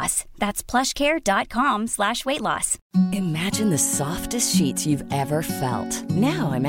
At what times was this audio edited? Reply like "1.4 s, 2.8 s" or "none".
2.7 s